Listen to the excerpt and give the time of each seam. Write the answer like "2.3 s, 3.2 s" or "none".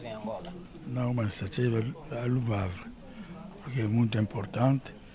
none